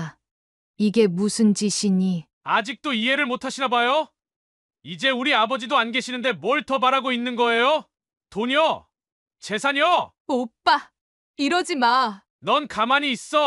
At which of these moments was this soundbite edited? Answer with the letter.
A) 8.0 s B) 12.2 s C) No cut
B